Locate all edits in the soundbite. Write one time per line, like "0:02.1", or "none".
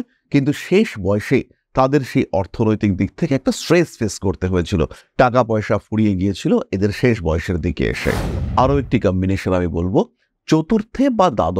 0:08.3